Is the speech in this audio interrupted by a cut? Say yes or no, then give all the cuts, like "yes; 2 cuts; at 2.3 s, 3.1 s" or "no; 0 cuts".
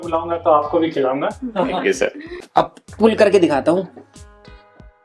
yes; 1 cut; at 2.3 s